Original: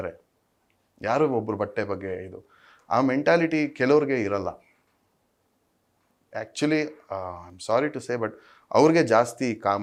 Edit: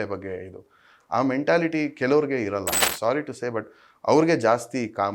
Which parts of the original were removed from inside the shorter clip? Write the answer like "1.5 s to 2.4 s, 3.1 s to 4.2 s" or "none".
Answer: 4.6 s to 7.5 s

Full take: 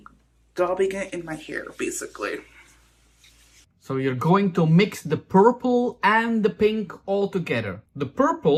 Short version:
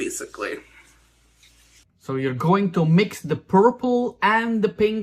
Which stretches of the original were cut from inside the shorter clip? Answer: none

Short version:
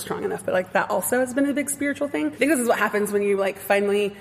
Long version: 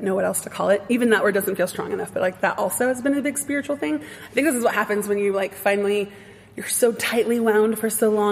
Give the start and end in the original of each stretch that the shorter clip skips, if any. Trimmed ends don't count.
4.0 s to 4.3 s

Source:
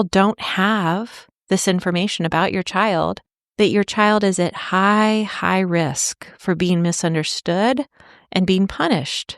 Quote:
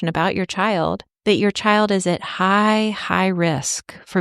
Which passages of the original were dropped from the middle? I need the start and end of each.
3.2 s to 3.4 s

